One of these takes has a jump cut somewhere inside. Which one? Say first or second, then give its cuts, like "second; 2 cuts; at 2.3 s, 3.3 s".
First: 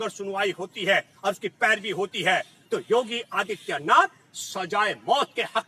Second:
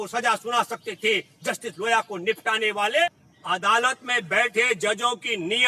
second; 1 cut; at 3.1 s